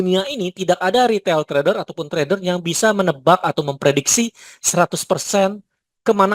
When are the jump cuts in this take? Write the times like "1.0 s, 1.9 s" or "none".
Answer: none

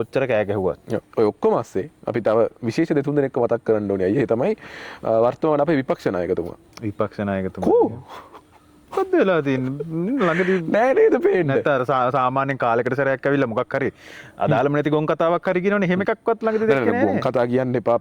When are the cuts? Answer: 1.1 s

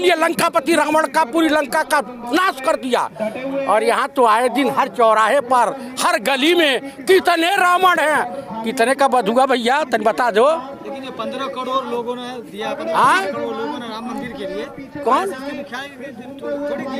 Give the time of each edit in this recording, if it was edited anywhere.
none

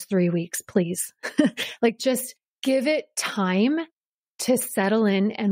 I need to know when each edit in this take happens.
2.6 s

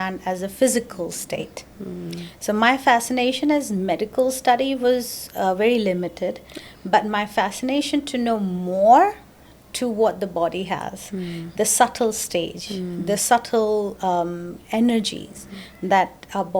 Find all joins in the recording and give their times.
none

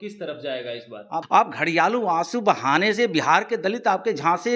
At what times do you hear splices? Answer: 1.2 s

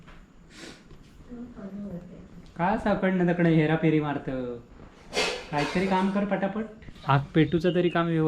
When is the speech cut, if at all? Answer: 6.8 s

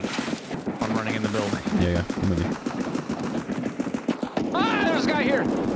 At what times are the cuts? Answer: none

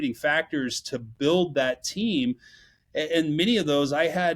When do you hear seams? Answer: none

